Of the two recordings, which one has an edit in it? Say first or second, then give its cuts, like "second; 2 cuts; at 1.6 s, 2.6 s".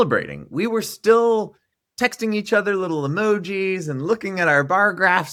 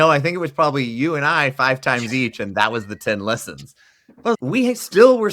second; 1 cut; at 4.4 s